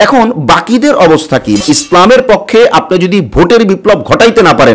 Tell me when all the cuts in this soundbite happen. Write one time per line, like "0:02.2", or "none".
0:01.6